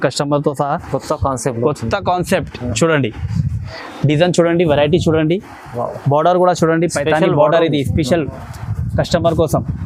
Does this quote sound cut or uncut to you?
uncut